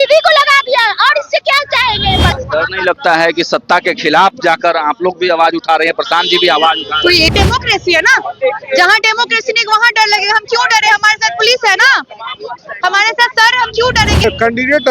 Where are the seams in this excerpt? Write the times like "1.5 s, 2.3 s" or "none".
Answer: 2.3 s, 7.3 s, 14.2 s